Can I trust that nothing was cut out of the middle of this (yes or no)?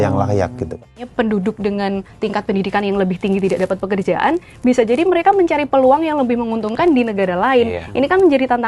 no